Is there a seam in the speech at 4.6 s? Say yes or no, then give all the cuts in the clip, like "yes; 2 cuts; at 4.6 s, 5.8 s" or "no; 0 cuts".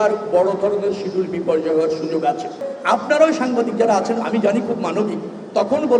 no; 1 cut; at 2.7 s